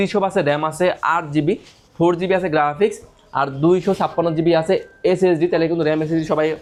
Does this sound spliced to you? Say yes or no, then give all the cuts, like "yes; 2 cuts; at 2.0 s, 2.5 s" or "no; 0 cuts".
no; 0 cuts